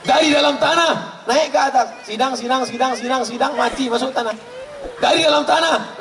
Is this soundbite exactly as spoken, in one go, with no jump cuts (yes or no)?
yes